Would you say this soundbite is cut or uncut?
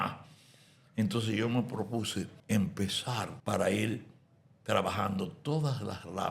cut